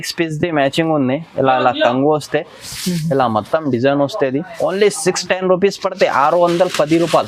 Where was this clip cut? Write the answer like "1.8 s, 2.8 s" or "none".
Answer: none